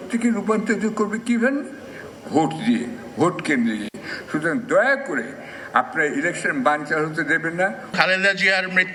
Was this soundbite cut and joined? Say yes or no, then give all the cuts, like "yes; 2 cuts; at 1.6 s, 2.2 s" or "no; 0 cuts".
no; 0 cuts